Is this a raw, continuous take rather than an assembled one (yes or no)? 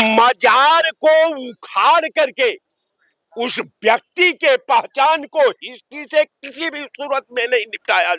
yes